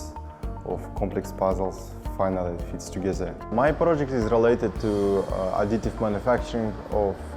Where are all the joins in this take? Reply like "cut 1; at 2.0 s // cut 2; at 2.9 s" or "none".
cut 1; at 3.4 s